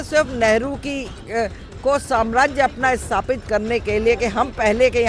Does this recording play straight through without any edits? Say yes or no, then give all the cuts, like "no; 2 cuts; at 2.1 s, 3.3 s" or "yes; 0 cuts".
yes; 0 cuts